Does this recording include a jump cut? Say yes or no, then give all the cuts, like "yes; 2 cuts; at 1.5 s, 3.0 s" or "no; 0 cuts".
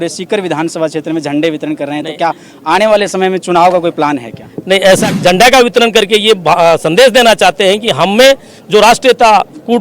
yes; 1 cut; at 5.0 s